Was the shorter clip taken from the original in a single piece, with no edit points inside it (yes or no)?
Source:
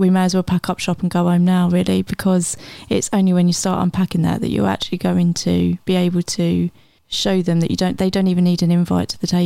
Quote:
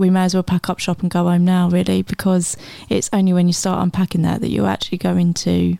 yes